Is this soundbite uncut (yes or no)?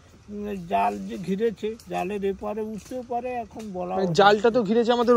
yes